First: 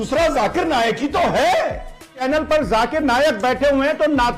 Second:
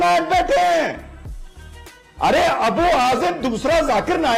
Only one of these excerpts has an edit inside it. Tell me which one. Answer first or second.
first